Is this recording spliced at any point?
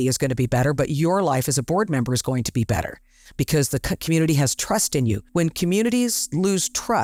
no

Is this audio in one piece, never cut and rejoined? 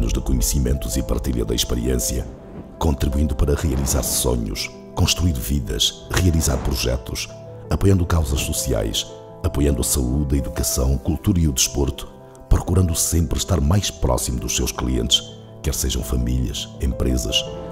yes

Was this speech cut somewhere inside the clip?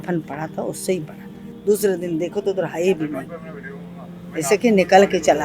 yes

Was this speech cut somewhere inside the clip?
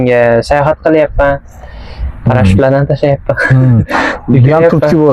no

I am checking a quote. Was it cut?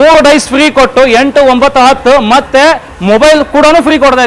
no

